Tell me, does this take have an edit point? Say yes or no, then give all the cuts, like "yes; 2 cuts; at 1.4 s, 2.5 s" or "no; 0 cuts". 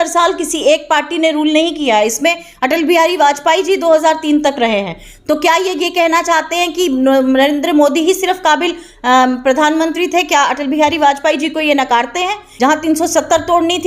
yes; 1 cut; at 12.4 s